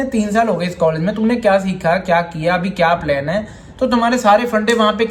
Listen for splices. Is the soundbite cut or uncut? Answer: uncut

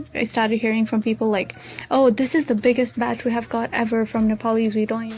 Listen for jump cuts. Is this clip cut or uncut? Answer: uncut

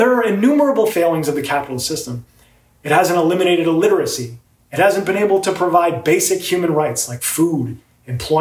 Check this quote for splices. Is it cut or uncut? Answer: cut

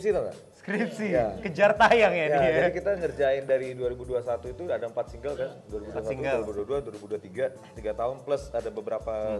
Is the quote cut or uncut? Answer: uncut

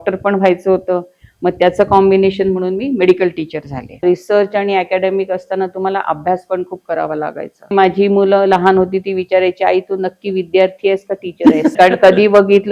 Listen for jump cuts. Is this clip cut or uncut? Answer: cut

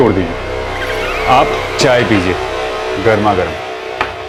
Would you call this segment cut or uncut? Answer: uncut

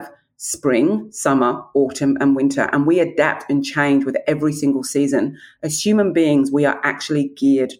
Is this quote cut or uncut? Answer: uncut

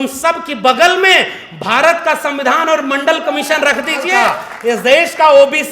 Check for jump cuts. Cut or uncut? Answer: cut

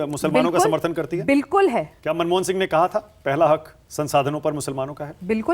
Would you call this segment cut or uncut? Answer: cut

